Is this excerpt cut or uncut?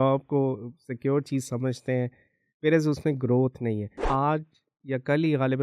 cut